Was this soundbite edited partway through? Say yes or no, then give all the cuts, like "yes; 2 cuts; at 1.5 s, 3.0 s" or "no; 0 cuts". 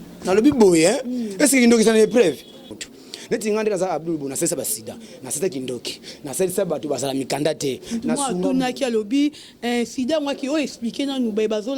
yes; 1 cut; at 2.9 s